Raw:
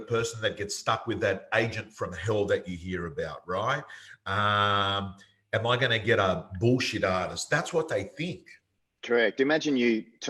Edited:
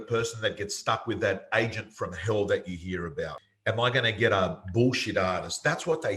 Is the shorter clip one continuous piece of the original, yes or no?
no